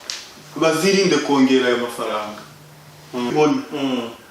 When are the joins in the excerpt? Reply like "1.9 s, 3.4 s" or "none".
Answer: 3.3 s